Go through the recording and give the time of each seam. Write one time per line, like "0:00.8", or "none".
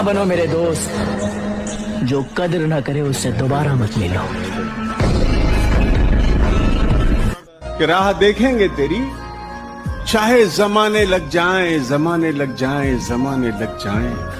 none